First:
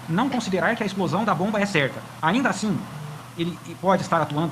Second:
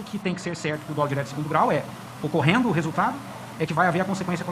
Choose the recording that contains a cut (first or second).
first